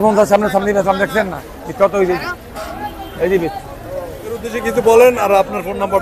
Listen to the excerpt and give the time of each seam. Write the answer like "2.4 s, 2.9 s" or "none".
4.6 s